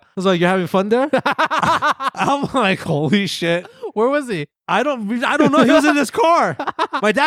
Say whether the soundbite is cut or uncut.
uncut